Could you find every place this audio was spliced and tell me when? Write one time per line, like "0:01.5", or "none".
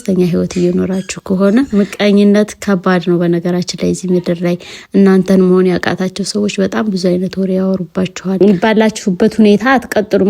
0:01.7
0:08.4